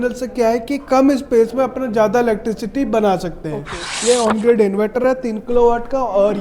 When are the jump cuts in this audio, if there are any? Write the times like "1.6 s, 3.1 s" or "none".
3.9 s